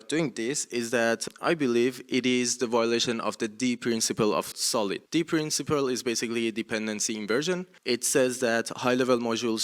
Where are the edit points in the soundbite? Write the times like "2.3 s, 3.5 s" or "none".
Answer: 1.3 s, 4.7 s, 7.7 s

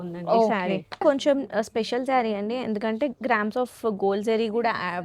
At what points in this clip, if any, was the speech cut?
1.0 s

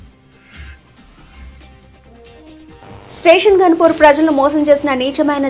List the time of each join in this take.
none

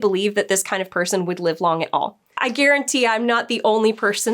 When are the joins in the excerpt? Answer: 2.2 s

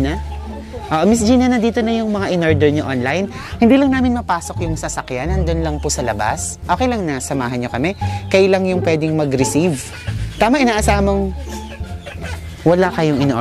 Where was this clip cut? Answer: none

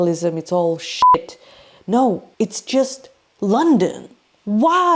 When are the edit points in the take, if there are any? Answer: 2.3 s

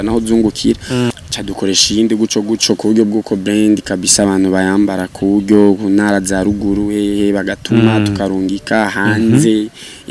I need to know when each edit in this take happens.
1.1 s

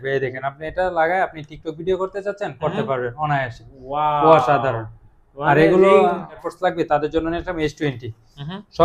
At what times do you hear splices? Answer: 6.4 s

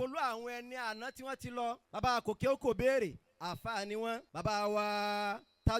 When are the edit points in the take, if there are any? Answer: 1.8 s, 4.3 s

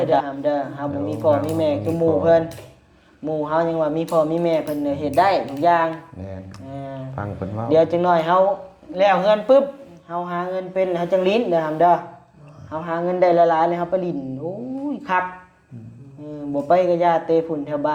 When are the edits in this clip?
none

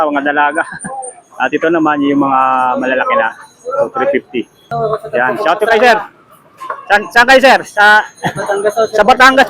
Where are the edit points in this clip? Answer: 4.7 s

